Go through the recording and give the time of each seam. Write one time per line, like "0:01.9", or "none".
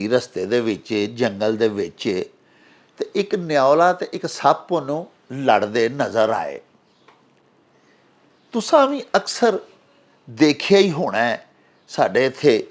none